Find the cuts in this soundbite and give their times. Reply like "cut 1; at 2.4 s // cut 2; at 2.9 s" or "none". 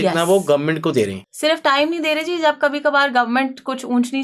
cut 1; at 1.2 s